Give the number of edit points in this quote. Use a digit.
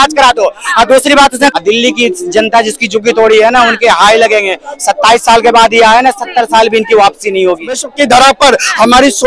2